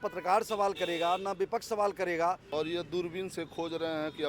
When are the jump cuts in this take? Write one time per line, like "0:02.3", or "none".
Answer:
0:02.4